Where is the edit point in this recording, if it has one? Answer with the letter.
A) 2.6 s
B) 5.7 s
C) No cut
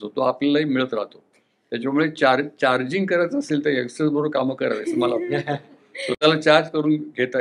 C